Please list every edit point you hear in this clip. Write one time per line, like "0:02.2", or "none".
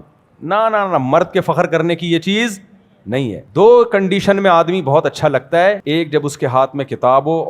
0:03.5

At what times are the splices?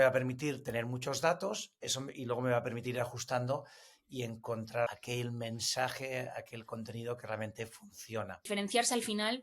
0:04.9
0:08.4

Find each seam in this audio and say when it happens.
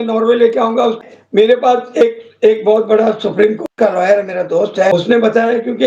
0:01.0
0:04.9

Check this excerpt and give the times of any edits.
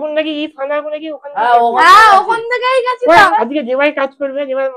0:03.3

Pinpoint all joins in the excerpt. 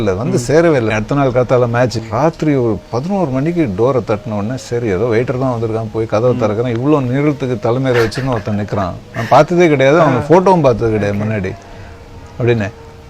0:00.9
0:02.0

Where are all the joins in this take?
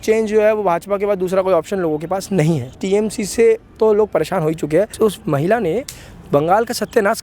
0:02.8
0:04.9

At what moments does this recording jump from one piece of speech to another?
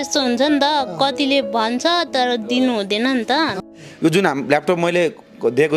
0:03.6

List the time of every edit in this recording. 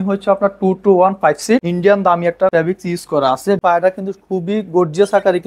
0:01.7
0:02.5
0:03.6

